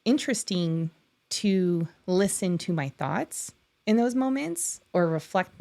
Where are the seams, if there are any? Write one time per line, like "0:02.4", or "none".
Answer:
none